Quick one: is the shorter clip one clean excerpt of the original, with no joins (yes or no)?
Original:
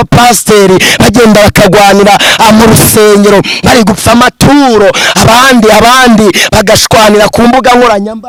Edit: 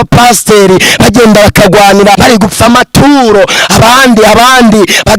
no